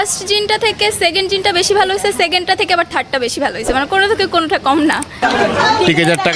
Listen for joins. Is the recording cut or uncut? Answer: cut